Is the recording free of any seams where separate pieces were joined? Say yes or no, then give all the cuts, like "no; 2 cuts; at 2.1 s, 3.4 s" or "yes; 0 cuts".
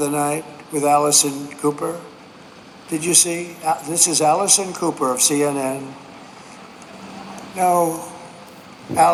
yes; 0 cuts